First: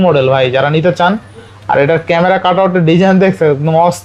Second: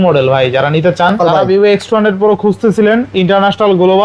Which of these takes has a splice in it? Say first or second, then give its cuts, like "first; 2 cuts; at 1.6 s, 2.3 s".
second; 1 cut; at 1.2 s